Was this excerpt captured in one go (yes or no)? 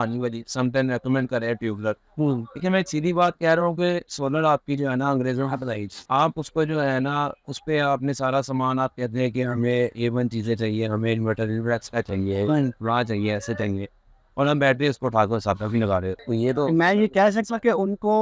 yes